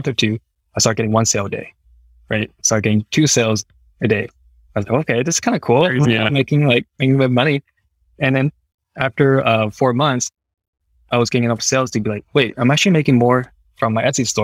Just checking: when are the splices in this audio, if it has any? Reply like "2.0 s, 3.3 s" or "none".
none